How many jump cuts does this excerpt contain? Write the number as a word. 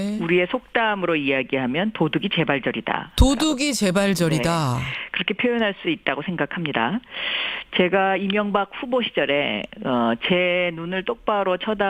zero